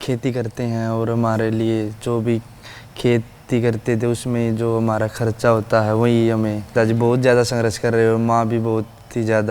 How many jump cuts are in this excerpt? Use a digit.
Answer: 1